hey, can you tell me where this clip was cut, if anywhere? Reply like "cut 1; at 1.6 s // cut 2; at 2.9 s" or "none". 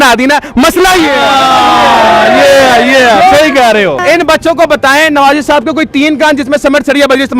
cut 1; at 4.0 s